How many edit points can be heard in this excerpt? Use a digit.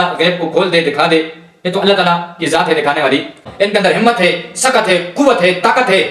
1